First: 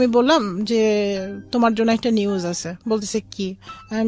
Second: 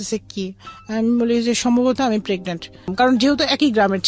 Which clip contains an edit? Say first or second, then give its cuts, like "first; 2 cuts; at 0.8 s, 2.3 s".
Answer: second; 1 cut; at 2.9 s